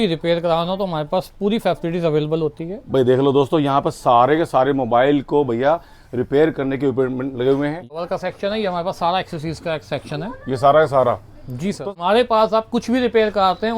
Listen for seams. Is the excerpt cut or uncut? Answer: cut